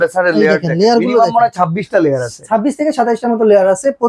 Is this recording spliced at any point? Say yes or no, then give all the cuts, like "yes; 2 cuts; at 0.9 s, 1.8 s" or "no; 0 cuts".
no; 0 cuts